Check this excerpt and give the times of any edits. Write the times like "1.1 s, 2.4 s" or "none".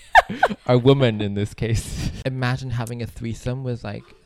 2.2 s